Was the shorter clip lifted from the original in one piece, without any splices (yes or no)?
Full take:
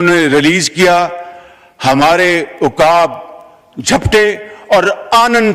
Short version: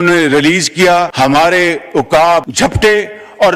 no